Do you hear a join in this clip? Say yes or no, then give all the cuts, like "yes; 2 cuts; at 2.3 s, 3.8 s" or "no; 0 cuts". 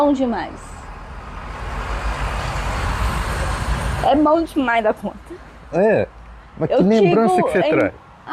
no; 0 cuts